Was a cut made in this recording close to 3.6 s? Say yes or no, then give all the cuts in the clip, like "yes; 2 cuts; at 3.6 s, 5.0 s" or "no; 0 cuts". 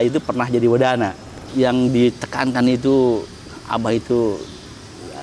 no; 1 cut; at 1.4 s